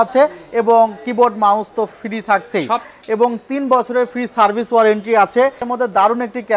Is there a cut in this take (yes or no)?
yes